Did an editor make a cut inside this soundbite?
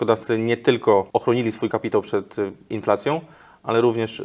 yes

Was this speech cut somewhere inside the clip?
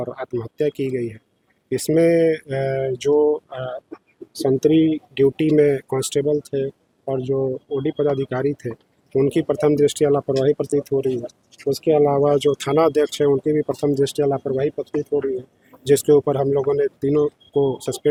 no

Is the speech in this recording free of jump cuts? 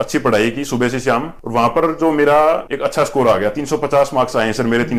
yes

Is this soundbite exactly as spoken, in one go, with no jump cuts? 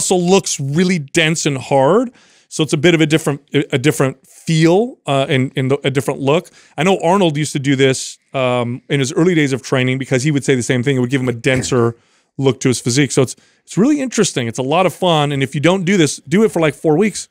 yes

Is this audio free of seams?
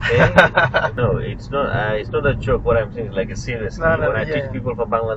no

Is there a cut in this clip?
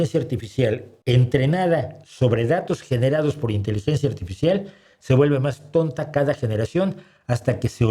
yes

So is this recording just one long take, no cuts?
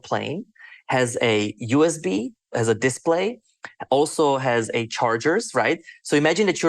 no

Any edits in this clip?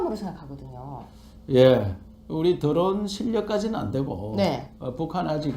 yes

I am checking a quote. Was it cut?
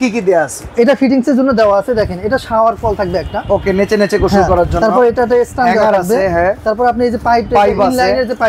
no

